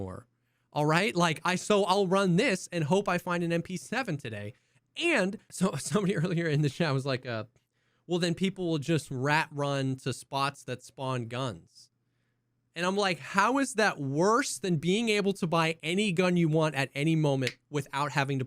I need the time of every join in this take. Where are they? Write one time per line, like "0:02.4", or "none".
0:05.4